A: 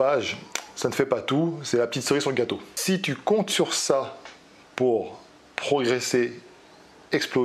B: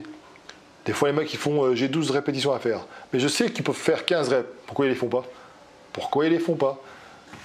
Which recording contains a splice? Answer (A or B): A